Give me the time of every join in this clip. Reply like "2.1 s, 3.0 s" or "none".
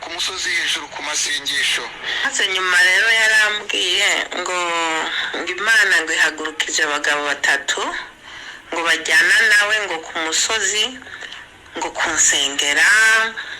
2.2 s